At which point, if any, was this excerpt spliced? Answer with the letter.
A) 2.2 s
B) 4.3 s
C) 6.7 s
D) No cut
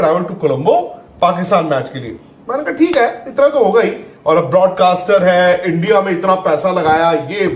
D